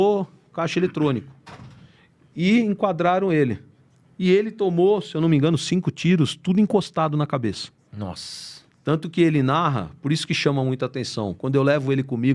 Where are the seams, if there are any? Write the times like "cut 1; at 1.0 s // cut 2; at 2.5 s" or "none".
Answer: none